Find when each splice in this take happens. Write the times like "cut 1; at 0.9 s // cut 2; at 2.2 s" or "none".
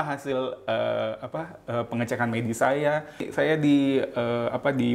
cut 1; at 3.3 s